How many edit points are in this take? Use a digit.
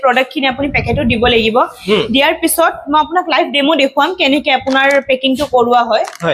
0